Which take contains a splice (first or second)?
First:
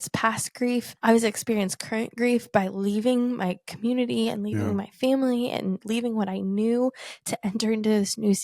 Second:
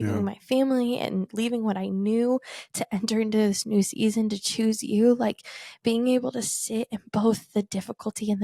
first